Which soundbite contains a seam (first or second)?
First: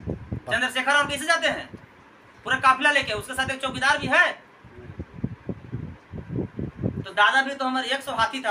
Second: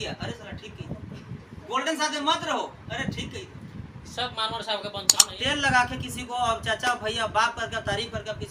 second